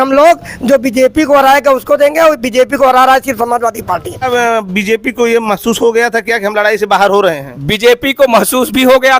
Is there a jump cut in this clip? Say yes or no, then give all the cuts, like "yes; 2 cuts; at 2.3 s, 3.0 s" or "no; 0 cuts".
yes; 1 cut; at 4.3 s